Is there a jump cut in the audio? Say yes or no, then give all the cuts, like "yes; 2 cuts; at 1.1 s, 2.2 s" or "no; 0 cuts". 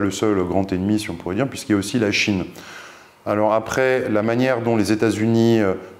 no; 0 cuts